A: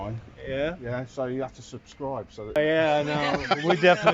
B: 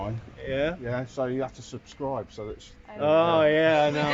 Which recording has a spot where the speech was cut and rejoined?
A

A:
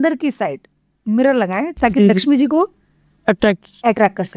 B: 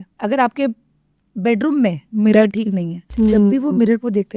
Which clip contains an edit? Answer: B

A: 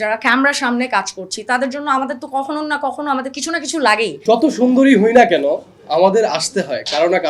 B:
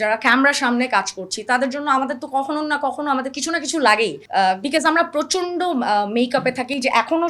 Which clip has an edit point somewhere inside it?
A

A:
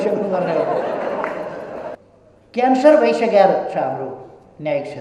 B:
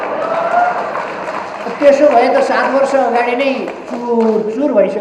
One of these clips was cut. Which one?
A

